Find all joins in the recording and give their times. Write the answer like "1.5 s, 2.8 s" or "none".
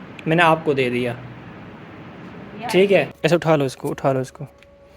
3.1 s